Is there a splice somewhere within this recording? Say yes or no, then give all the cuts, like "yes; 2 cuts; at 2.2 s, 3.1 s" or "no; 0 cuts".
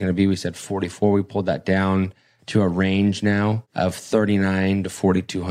yes; 1 cut; at 3.6 s